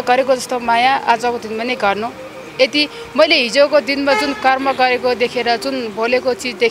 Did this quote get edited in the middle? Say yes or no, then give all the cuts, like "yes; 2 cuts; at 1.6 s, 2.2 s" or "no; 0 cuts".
no; 0 cuts